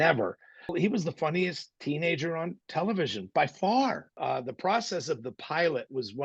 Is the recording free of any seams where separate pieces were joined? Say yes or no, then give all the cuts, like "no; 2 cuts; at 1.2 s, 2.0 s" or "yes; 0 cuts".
no; 4 cuts; at 0.7 s, 1.7 s, 2.6 s, 4.1 s